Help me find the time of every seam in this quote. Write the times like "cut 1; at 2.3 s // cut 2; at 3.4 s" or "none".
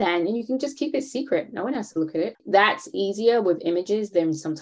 none